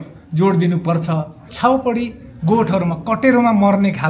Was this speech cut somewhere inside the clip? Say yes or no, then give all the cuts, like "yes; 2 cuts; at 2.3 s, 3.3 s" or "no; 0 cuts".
yes; 1 cut; at 1.5 s